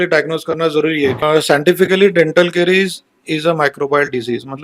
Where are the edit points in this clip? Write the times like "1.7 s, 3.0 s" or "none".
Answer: 1.2 s